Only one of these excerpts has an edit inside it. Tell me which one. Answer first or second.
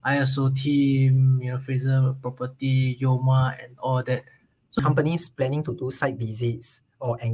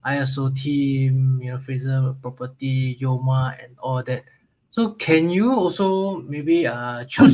first